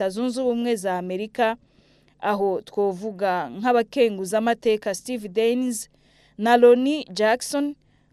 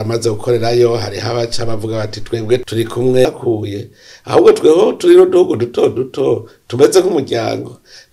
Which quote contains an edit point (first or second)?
second